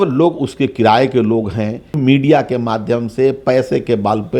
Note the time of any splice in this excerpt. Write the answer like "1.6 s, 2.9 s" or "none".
2.0 s